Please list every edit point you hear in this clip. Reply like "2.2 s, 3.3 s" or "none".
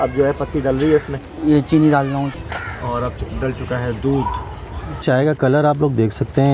1.2 s, 2.3 s